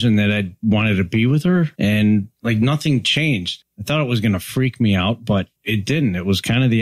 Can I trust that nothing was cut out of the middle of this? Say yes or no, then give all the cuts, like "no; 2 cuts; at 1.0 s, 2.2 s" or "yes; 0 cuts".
no; 4 cuts; at 1.7 s, 2.3 s, 3.5 s, 5.6 s